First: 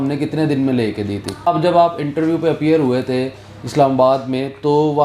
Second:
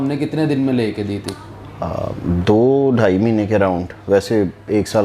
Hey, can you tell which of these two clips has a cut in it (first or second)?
first